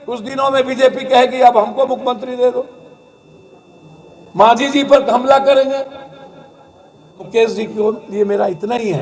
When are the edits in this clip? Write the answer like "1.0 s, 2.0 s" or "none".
7.3 s